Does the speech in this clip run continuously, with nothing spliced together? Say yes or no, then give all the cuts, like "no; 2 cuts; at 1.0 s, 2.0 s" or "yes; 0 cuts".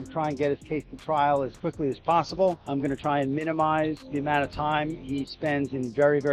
no; 1 cut; at 2.6 s